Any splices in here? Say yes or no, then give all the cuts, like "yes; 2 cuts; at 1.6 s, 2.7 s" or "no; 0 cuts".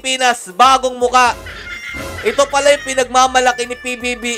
no; 0 cuts